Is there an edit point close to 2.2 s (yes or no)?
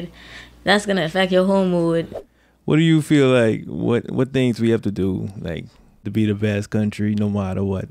yes